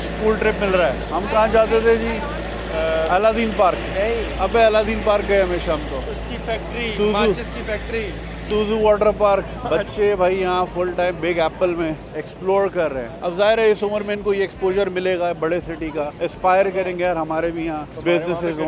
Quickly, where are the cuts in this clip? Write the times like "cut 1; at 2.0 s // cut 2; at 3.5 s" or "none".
none

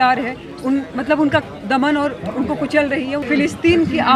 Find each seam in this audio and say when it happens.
cut 1; at 3.2 s

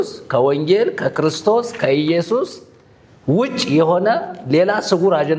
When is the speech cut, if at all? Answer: none

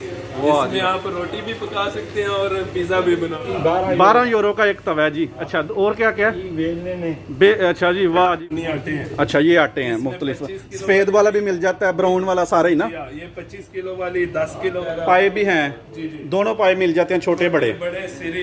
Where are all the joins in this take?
cut 1; at 3.2 s // cut 2; at 8.4 s // cut 3; at 14.8 s

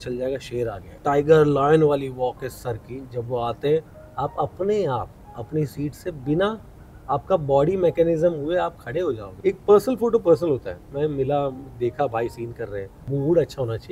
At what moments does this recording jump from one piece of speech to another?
cut 1; at 0.9 s // cut 2; at 9.3 s // cut 3; at 13.0 s

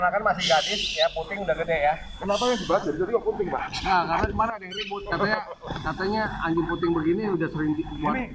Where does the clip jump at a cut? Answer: none

